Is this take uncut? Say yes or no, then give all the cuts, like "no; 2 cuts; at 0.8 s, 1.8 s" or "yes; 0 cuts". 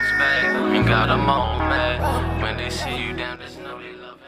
yes; 0 cuts